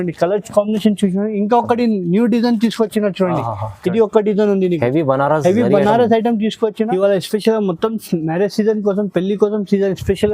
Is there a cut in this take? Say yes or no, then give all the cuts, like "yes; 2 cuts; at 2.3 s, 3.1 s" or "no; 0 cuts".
yes; 1 cut; at 6.9 s